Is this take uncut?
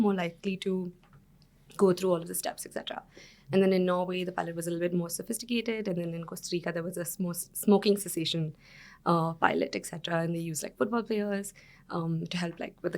yes; 0 cuts

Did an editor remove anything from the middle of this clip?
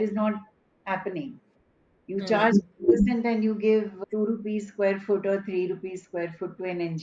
no; 0 cuts

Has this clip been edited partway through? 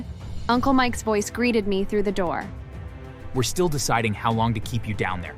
no; 0 cuts

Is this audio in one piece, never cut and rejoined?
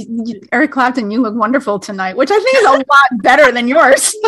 yes; 0 cuts

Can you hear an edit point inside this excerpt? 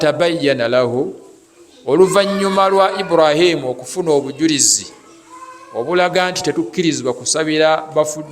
no; 0 cuts

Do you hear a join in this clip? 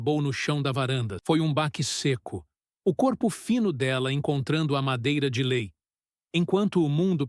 yes; 1 cut; at 1.1 s

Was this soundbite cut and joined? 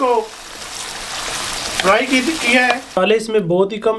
yes; 1 cut; at 3.0 s

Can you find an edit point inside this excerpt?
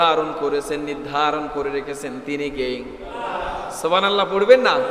no; 0 cuts

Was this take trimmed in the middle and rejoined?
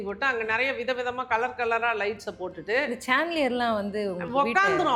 no; 0 cuts

